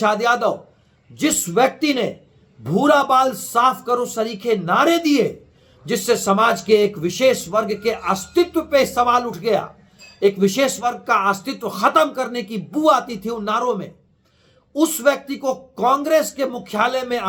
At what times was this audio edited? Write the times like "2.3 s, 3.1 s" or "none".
none